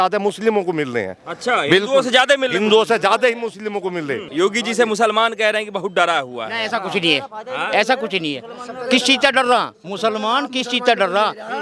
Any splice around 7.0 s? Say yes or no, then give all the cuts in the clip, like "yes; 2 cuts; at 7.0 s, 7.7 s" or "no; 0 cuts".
no; 1 cut; at 4.2 s